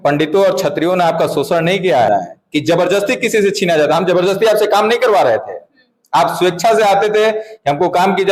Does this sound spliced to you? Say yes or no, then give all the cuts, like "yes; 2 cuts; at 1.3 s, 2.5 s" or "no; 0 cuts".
yes; 1 cut; at 2.1 s